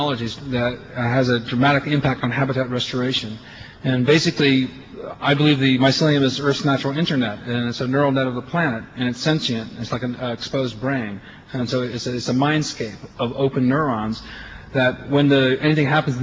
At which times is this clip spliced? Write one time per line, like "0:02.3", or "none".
0:02.5